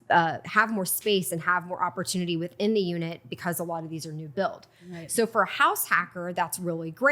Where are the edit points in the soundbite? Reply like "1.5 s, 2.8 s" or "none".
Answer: none